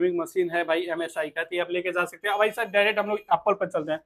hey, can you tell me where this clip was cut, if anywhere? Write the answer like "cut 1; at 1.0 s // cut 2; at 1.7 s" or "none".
none